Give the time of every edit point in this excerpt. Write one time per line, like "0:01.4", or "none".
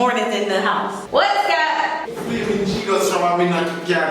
0:01.0
0:02.1